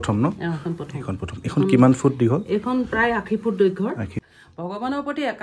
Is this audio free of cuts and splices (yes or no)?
no